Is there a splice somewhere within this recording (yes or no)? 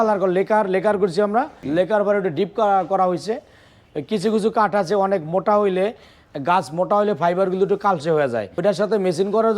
yes